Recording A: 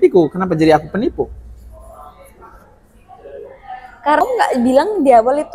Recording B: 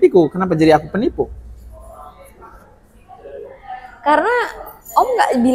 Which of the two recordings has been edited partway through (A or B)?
A